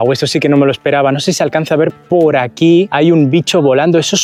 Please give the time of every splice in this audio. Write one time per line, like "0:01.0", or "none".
none